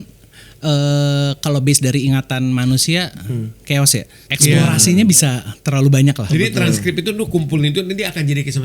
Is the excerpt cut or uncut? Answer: cut